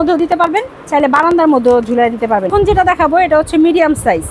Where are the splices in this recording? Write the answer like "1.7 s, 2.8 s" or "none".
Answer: 2.5 s